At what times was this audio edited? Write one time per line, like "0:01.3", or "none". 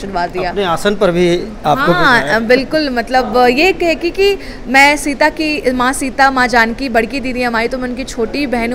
none